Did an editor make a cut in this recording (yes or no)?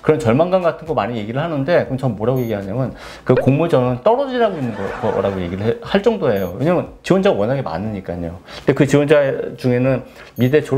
no